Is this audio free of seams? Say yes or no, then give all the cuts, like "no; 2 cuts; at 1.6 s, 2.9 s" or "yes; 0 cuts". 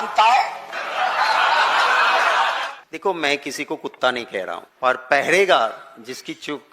no; 2 cuts; at 2.8 s, 4.7 s